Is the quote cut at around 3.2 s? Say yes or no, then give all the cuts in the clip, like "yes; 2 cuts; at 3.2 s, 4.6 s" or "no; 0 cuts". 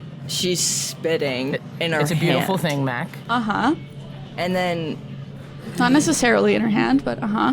yes; 1 cut; at 3.2 s